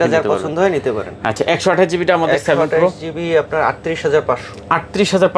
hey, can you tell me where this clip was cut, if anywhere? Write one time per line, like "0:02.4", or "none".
none